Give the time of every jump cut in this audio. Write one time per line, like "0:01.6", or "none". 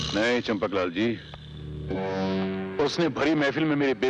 none